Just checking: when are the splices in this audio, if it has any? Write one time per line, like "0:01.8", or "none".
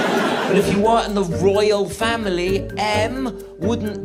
none